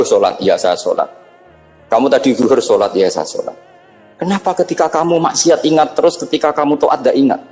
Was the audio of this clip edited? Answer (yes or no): no